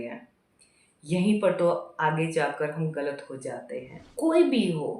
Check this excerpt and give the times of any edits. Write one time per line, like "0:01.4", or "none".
0:04.0